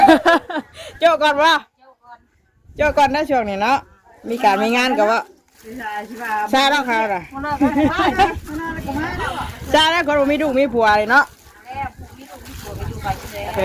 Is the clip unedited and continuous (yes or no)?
yes